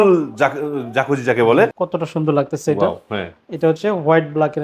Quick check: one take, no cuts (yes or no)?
no